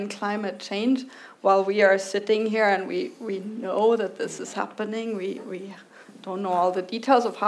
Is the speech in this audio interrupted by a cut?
no; 0 cuts

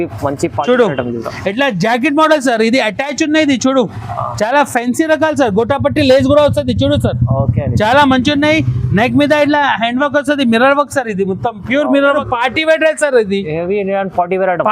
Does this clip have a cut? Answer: yes; 1 cut; at 12.1 s

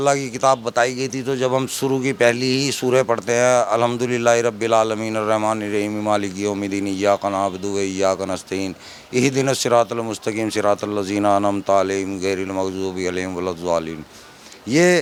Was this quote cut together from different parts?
no; 0 cuts

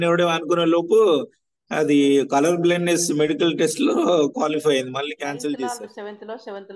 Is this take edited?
yes; 1 cut; at 5.7 s

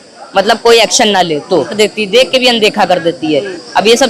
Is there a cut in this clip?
yes; 1 cut; at 1.7 s

